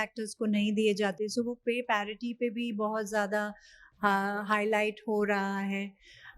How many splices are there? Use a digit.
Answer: 0